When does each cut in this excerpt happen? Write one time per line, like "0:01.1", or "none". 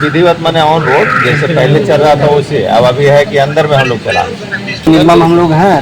0:04.9